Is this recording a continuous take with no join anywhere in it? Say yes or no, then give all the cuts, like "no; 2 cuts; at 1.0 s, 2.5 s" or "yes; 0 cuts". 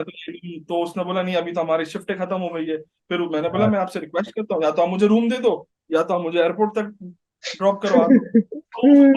yes; 0 cuts